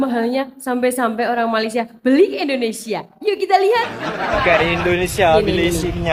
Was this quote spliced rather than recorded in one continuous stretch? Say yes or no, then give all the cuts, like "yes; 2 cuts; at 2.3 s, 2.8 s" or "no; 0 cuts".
no; 0 cuts